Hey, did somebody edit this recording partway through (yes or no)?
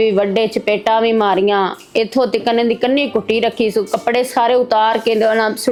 no